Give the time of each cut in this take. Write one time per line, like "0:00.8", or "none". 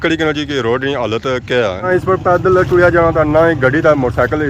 0:01.9